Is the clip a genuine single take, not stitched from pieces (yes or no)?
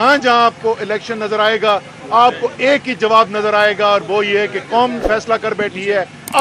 yes